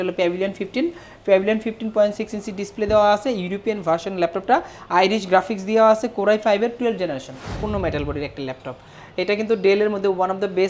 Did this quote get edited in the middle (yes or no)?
yes